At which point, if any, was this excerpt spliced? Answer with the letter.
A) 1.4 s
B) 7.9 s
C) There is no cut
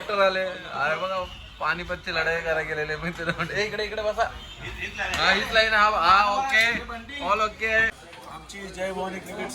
B